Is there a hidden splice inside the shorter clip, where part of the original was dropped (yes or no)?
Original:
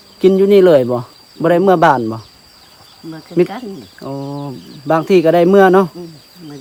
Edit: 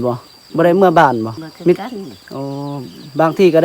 yes